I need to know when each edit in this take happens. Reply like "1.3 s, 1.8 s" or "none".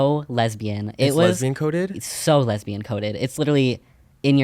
none